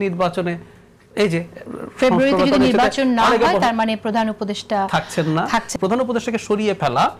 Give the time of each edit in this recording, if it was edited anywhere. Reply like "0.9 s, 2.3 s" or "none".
5.7 s